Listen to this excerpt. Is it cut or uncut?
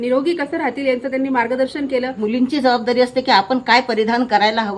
cut